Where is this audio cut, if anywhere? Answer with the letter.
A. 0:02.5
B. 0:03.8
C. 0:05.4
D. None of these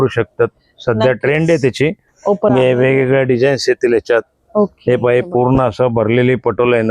A